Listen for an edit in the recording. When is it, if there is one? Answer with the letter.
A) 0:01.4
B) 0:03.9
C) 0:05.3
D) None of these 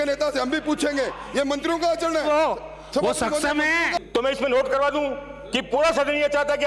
B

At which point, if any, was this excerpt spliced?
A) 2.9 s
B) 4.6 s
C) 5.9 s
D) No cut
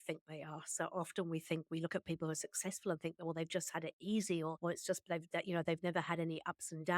B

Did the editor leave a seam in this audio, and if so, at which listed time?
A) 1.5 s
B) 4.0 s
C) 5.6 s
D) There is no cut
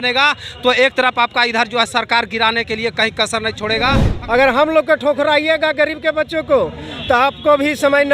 B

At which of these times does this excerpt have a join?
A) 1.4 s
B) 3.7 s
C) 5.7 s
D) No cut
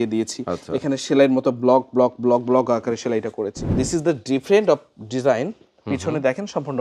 B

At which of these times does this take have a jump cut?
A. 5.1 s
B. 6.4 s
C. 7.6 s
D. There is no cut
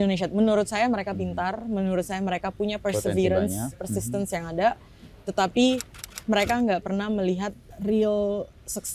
C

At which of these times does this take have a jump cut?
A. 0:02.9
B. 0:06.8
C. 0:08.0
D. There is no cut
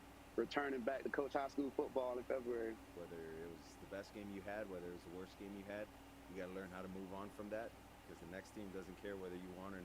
A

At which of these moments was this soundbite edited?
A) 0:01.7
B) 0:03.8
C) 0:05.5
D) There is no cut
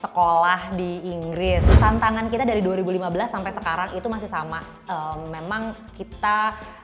A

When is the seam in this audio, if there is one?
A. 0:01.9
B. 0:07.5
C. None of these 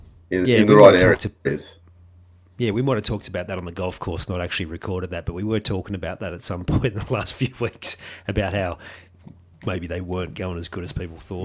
C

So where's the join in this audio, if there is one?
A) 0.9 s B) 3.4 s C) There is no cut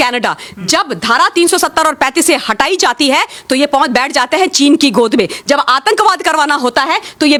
C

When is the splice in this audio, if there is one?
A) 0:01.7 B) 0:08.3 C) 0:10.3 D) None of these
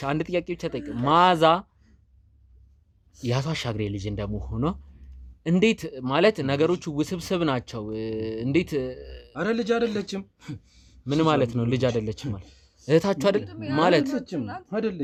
D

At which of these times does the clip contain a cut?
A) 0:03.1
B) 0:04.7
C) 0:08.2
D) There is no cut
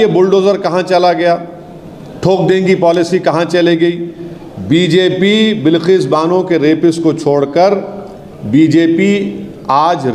D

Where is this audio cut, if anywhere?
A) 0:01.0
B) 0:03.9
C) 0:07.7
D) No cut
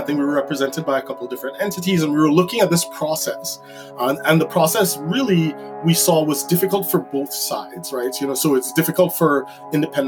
D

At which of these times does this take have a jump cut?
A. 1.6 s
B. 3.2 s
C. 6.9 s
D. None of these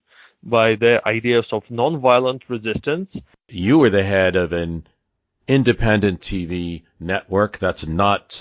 B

